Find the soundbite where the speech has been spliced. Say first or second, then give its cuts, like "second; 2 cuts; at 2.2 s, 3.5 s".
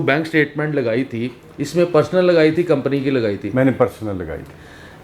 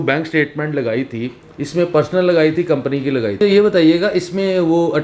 second; 1 cut; at 3.4 s